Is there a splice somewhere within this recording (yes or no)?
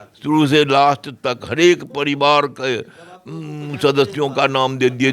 no